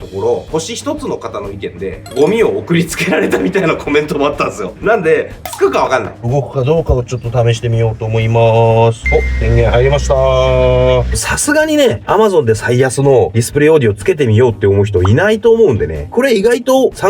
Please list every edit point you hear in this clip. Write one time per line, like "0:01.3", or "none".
0:01.9
0:04.8
0:06.3
0:09.0
0:11.1
0:16.1